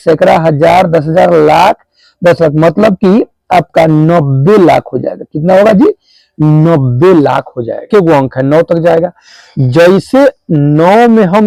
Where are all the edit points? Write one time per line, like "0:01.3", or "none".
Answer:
0:07.9